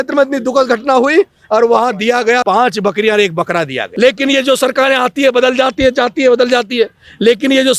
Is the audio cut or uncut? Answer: cut